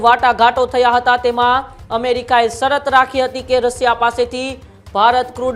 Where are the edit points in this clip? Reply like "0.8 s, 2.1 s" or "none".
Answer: none